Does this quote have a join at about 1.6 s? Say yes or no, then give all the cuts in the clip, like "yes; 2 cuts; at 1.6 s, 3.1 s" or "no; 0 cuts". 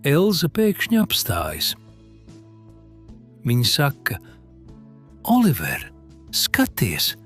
yes; 2 cuts; at 1.6 s, 3.4 s